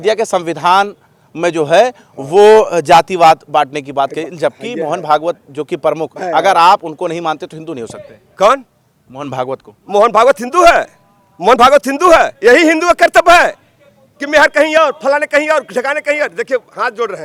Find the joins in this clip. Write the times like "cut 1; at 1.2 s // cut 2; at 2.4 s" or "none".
none